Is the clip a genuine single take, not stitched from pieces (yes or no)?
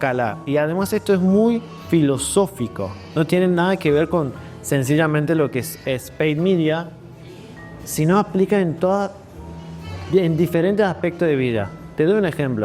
yes